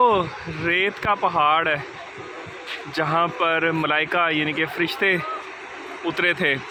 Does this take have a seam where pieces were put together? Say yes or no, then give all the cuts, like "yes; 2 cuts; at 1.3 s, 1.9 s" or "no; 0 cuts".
no; 0 cuts